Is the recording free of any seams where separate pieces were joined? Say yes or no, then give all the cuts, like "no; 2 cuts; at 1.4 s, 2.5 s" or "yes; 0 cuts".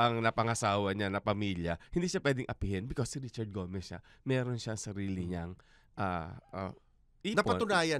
yes; 0 cuts